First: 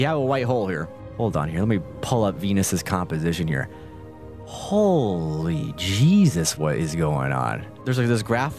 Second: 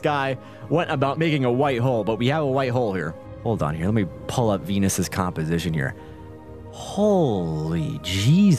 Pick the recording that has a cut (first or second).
second